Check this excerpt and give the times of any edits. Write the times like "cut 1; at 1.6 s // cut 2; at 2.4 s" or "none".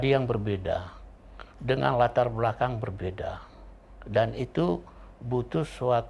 none

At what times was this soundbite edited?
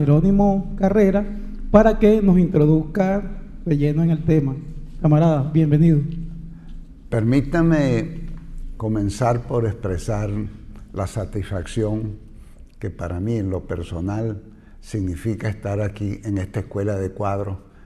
cut 1; at 7.6 s

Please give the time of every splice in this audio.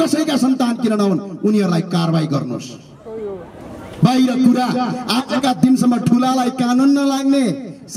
none

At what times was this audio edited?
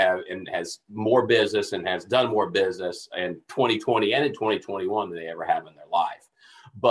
none

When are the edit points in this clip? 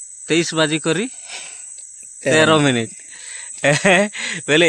none

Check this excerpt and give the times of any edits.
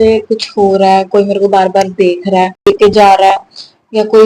cut 1; at 2.7 s

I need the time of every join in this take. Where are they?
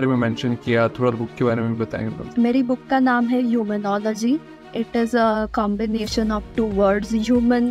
cut 1; at 2.3 s

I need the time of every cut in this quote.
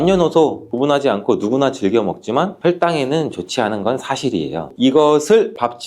cut 1; at 4.7 s

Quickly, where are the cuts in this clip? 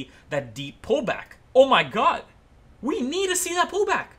cut 1; at 1.3 s

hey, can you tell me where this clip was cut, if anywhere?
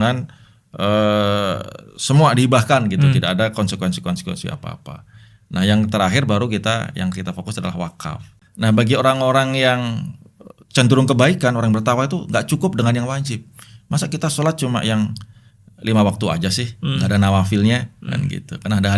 cut 1; at 8.3 s

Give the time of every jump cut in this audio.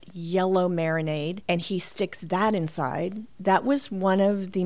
cut 1; at 1.4 s // cut 2; at 3.3 s

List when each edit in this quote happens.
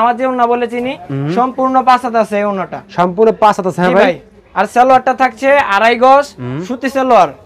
none

